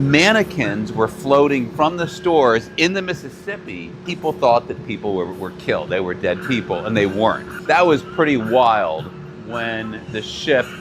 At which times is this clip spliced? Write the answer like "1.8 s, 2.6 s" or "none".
4.0 s, 7.5 s